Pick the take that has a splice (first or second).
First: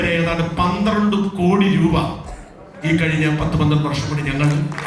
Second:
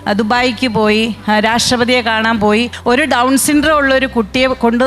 second